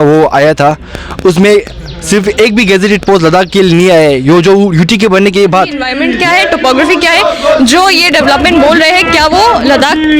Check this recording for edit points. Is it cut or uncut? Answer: cut